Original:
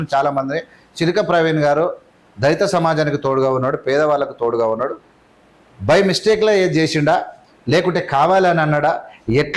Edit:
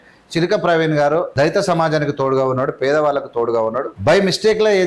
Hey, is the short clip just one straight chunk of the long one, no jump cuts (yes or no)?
no